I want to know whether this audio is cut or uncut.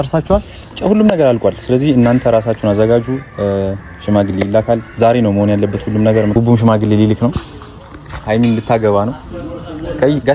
cut